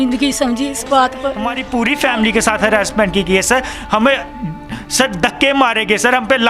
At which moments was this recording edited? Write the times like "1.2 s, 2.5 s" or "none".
1.5 s